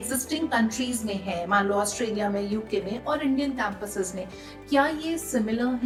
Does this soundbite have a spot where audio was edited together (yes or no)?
no